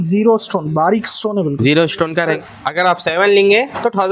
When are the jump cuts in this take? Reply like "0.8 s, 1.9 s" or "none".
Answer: 2.3 s